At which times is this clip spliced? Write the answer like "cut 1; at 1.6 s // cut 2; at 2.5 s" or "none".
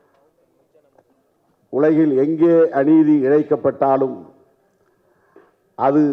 none